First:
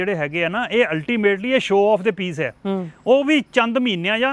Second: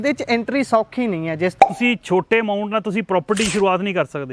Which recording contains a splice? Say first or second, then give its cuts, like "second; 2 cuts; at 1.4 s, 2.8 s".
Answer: second; 1 cut; at 1.6 s